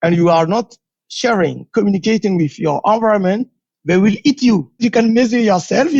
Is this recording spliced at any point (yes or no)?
yes